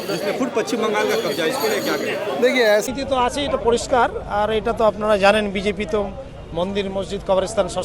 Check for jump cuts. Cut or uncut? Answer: cut